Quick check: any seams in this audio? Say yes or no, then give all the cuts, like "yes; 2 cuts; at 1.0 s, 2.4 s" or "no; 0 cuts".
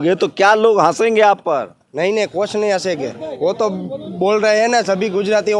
no; 0 cuts